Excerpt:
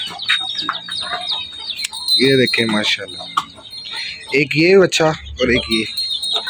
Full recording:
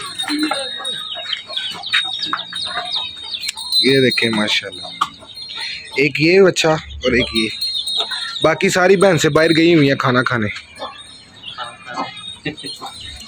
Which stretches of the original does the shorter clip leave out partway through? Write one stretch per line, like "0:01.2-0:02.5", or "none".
none